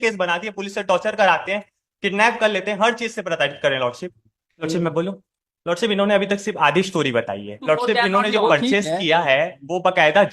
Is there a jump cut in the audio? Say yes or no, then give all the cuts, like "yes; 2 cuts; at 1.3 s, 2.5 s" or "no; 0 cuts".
yes; 2 cuts; at 4.7 s, 7.6 s